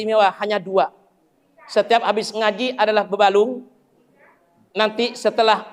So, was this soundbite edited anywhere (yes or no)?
no